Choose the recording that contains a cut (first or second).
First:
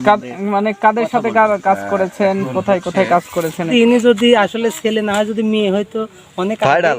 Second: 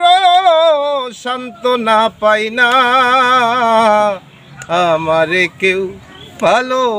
first